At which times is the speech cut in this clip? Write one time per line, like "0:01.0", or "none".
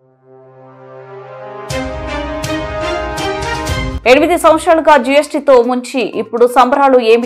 0:03.9